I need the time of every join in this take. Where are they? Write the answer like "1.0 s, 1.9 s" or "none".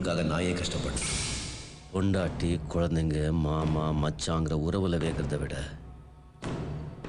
none